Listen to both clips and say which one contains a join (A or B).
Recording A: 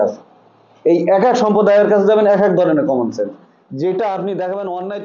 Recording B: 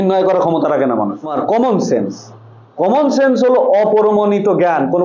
B